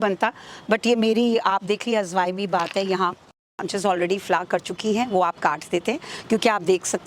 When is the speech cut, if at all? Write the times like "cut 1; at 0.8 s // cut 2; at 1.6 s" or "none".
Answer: cut 1; at 3.4 s